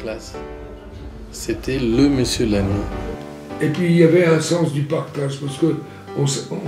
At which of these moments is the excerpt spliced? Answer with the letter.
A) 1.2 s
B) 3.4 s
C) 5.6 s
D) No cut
B